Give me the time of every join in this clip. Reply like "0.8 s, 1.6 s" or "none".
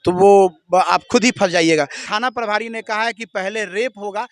2.0 s